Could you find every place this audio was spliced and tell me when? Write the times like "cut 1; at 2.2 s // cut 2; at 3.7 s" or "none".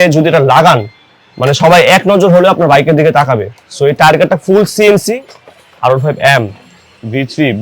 cut 1; at 5.2 s